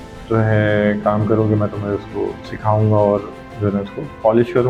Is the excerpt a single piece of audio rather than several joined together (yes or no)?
yes